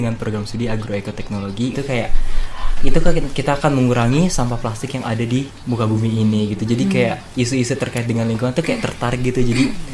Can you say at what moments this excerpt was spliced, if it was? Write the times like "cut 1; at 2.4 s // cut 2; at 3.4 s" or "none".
cut 1; at 1.7 s